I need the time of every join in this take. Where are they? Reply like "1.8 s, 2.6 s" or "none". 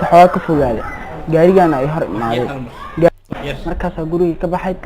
3.1 s